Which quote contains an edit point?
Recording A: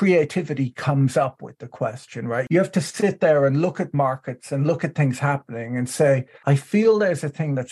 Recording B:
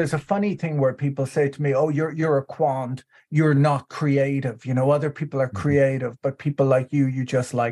A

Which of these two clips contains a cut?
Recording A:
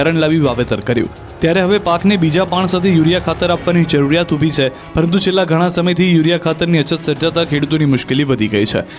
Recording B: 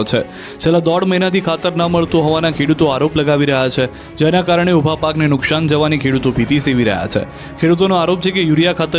B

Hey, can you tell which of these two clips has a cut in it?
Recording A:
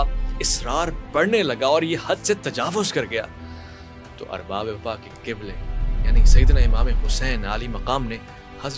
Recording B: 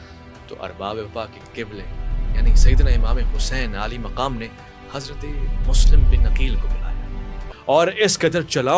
B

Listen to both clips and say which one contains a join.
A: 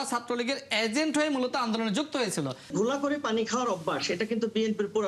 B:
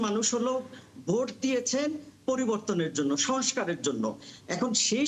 A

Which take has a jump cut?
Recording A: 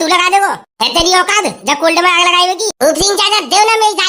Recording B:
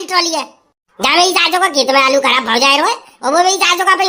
A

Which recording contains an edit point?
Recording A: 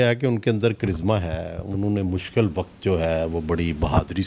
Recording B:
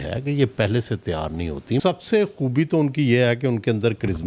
B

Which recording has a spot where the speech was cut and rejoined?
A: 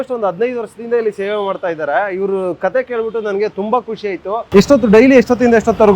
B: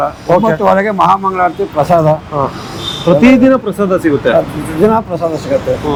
A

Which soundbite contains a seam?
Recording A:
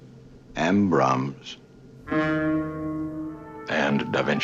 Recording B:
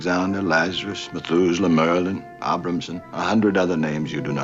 A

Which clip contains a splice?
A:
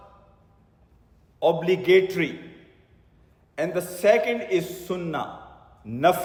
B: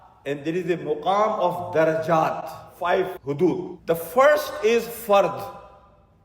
B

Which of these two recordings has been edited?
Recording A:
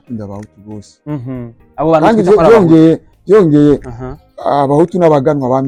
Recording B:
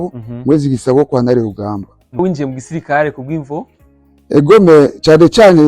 B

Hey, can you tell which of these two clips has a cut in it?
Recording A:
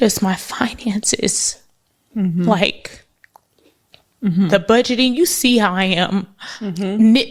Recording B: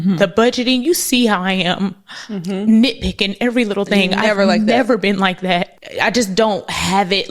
B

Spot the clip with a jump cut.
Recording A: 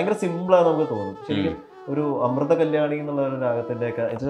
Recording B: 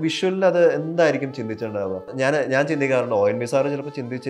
B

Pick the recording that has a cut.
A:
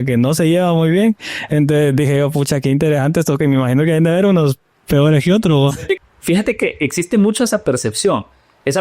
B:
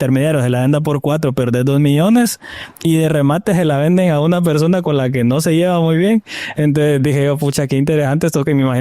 A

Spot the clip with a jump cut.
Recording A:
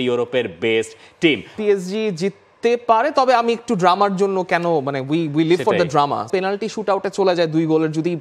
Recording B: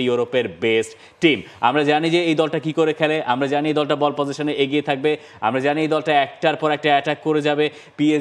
A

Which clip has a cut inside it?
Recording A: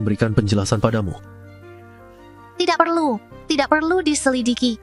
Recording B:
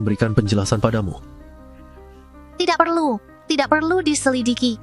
B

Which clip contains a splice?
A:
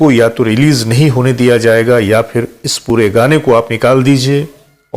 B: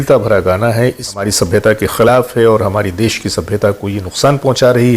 B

